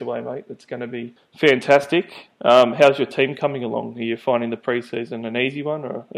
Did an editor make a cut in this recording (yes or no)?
yes